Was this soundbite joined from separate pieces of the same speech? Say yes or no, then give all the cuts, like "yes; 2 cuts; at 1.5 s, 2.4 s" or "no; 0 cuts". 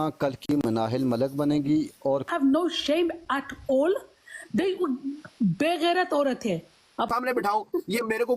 yes; 2 cuts; at 2.3 s, 7.1 s